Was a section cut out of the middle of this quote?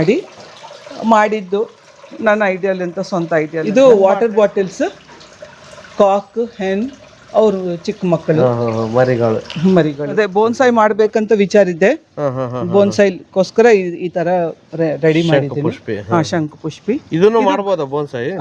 yes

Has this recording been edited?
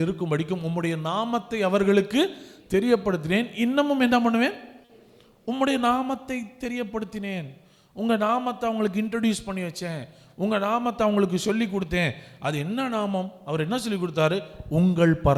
no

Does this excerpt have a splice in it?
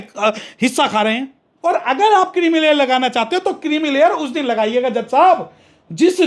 yes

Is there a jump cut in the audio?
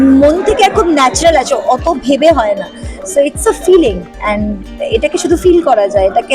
yes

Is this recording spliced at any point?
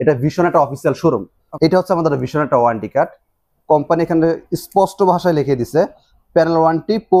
yes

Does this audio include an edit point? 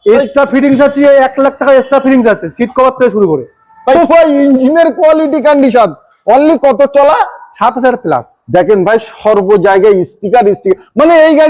yes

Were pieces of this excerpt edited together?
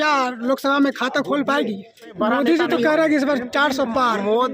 yes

